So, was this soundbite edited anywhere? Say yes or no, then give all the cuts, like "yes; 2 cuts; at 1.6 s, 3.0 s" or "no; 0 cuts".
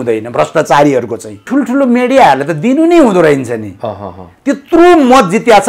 yes; 1 cut; at 1.5 s